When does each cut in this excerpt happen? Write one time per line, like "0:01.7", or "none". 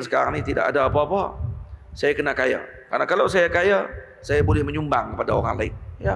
none